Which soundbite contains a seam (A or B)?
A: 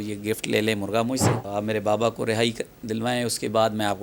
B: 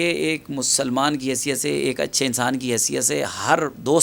A